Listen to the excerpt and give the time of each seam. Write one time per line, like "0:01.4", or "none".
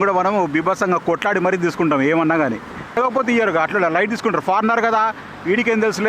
0:02.9

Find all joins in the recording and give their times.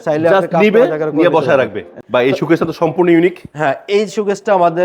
0:02.0

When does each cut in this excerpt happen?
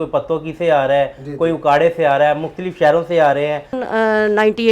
0:03.8

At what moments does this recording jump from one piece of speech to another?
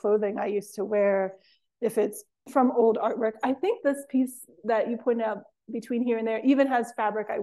none

